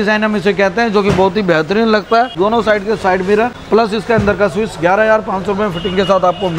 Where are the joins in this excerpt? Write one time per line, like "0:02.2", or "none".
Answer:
0:02.3
0:03.6